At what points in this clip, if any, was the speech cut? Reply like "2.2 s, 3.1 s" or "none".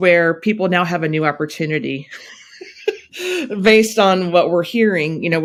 none